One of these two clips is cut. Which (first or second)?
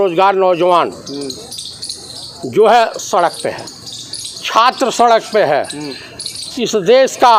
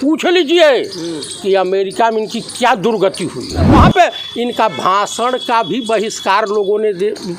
second